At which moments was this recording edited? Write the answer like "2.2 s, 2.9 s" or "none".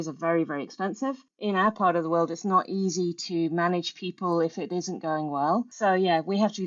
1.3 s, 5.7 s